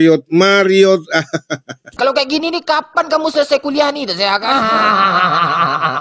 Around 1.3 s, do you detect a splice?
yes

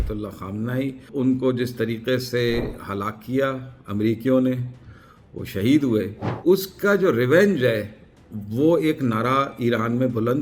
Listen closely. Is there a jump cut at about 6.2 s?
yes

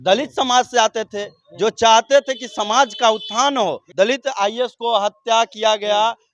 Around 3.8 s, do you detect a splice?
yes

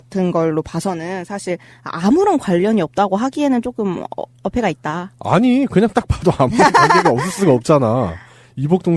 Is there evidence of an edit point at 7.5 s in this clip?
no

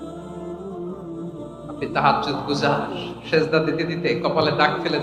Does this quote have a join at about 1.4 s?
yes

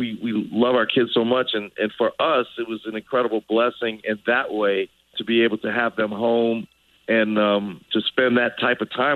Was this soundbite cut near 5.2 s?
yes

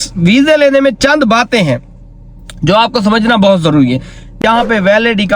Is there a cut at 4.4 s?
yes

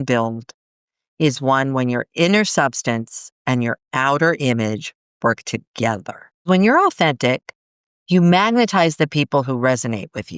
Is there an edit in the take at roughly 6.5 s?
yes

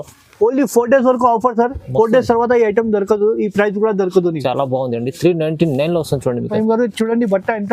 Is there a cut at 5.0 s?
no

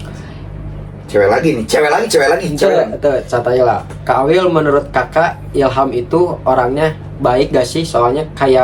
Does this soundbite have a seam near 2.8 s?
no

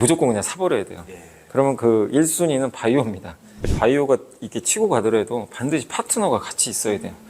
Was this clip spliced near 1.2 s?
no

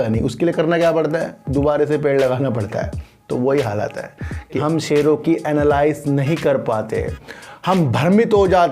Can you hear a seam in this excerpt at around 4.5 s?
yes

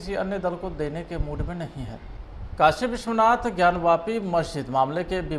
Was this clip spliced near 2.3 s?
yes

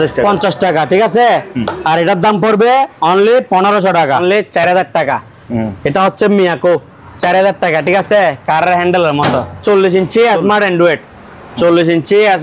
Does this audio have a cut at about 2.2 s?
no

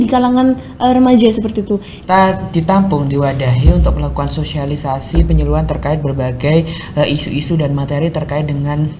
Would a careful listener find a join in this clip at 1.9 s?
yes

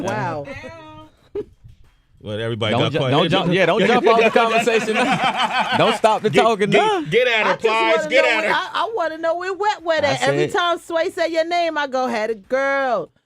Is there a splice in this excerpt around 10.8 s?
yes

